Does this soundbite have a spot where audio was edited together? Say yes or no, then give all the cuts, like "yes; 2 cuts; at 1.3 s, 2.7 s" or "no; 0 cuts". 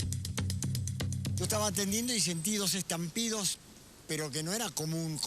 yes; 1 cut; at 1.2 s